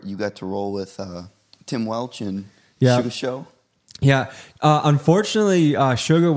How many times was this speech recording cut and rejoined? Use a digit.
0